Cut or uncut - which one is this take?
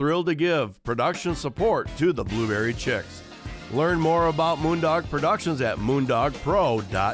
uncut